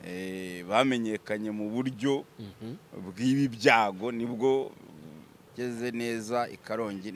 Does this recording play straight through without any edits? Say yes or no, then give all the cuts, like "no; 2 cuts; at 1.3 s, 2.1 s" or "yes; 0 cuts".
no; 1 cut; at 5.4 s